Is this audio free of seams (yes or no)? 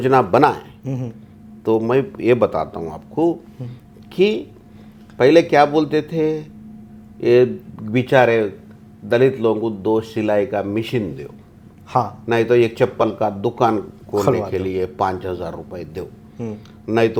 yes